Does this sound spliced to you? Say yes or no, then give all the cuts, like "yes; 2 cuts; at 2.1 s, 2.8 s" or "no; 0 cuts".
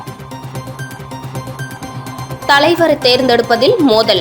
yes; 1 cut; at 1.0 s